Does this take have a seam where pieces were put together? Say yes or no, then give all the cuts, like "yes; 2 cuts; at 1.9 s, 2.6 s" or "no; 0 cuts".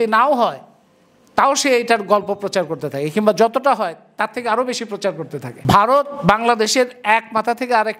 yes; 1 cut; at 5.5 s